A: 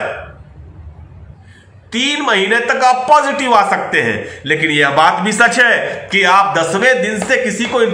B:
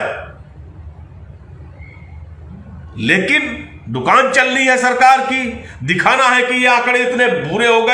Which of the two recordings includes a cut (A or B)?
A